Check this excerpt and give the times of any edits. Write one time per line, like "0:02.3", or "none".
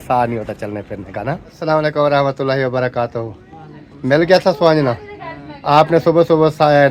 0:01.5

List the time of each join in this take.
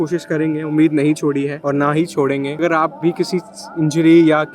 0:01.6
0:02.6

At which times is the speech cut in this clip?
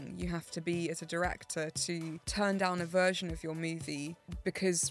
none

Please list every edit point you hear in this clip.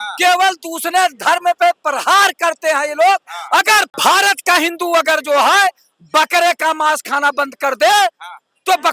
0:03.9

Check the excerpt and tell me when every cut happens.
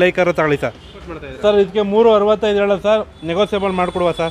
0:01.0

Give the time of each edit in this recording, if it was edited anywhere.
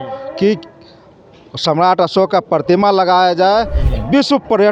0:03.8

